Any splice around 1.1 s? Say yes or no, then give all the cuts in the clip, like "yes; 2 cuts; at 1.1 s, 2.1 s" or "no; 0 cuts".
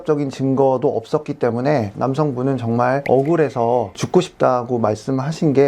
no; 0 cuts